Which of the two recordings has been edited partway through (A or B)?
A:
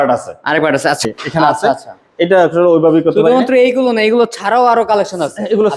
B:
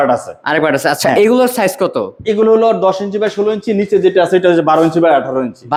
A